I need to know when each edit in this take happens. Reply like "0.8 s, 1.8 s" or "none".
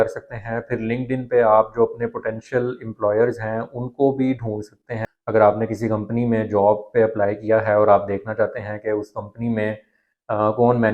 4.9 s